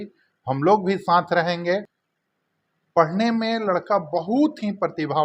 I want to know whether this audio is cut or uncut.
cut